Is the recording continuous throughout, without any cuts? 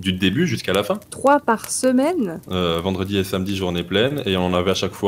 no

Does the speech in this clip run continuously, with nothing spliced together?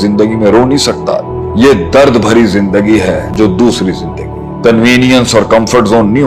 yes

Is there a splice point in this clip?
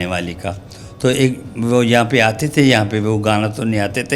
no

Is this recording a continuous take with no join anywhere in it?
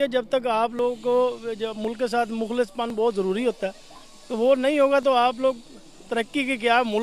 yes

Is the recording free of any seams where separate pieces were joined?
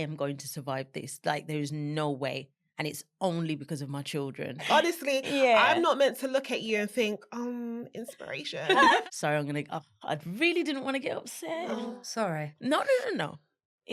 no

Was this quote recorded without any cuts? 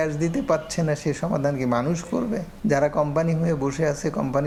yes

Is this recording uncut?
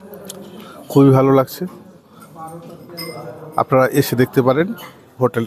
yes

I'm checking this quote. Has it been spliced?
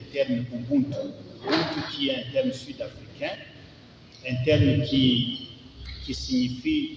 no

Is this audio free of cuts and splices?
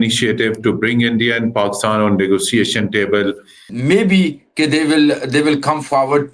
no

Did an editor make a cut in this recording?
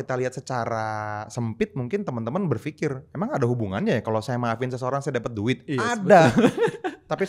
no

